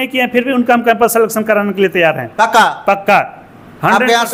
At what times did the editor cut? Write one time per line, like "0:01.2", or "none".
none